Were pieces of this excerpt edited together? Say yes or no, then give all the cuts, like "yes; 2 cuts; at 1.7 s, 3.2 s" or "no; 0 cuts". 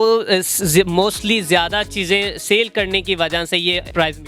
no; 0 cuts